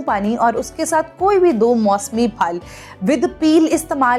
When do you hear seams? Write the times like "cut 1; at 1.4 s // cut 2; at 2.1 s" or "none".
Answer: none